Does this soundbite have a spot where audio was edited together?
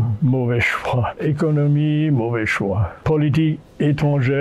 yes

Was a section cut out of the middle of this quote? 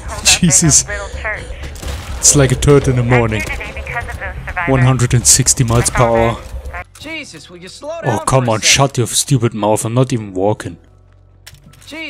yes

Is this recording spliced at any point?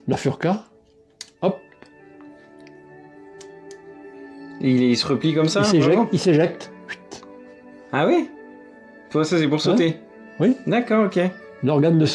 no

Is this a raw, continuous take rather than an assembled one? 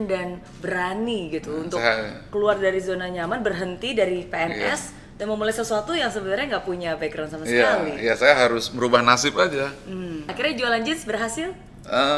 no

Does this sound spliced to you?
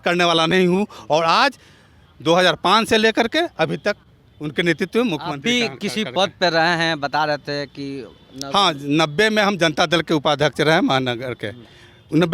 no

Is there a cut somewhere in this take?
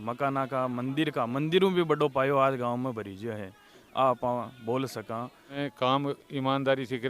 yes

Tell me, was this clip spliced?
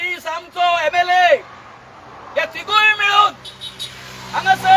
no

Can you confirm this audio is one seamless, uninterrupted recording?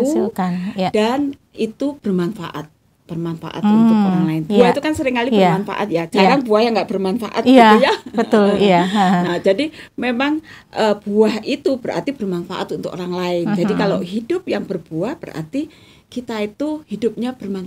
yes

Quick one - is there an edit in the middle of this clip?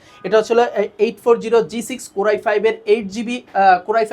no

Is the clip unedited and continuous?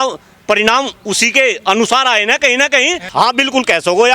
no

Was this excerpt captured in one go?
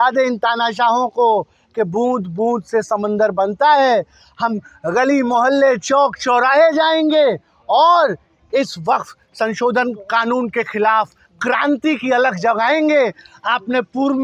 yes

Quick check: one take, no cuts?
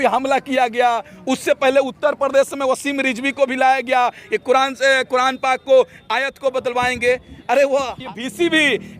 no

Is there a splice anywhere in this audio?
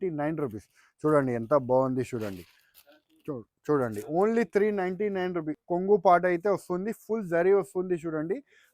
yes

